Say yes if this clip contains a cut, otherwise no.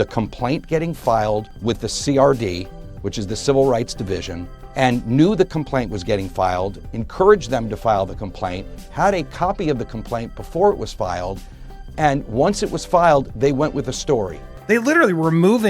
yes